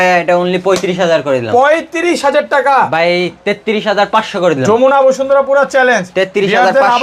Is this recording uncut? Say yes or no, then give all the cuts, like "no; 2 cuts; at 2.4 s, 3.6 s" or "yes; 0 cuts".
yes; 0 cuts